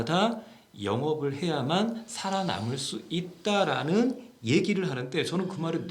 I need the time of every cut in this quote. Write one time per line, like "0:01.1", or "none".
none